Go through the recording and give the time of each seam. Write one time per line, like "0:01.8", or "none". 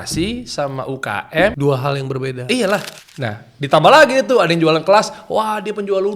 0:01.6
0:02.9